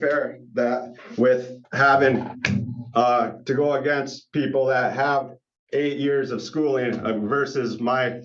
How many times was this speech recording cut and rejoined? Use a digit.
0